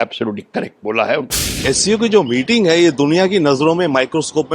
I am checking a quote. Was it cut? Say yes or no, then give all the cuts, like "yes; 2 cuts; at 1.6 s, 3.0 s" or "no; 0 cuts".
yes; 1 cut; at 1.6 s